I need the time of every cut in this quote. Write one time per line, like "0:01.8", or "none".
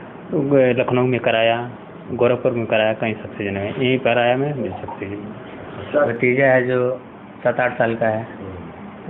0:06.1